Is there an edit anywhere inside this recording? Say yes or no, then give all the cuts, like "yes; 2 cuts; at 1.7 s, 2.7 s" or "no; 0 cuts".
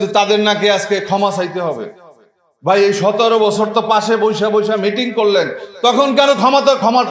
no; 0 cuts